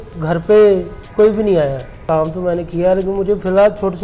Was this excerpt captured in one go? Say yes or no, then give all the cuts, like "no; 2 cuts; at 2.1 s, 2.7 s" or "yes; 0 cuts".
no; 2 cuts; at 1.0 s, 2.0 s